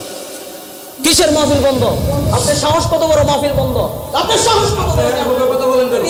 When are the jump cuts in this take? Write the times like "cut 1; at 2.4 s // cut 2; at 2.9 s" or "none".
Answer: none